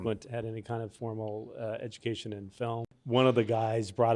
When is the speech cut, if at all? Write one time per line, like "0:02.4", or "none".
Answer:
0:02.9